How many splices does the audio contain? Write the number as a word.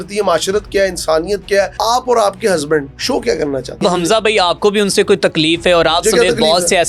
three